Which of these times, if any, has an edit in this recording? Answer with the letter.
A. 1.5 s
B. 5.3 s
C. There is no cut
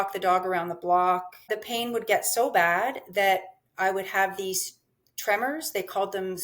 A